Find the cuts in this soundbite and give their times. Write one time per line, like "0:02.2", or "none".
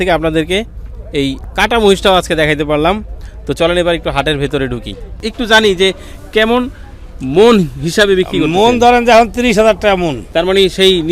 0:05.2
0:10.2